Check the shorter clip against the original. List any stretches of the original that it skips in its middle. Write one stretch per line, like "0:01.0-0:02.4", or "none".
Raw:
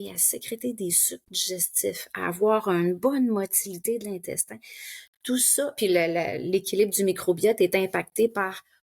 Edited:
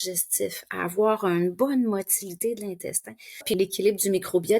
0:04.9-0:06.4